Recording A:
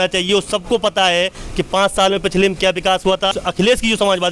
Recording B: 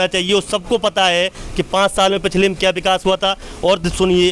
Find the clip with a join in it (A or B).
A